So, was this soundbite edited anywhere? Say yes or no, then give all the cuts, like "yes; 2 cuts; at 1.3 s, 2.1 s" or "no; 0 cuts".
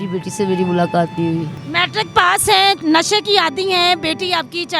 yes; 2 cuts; at 1.6 s, 2.8 s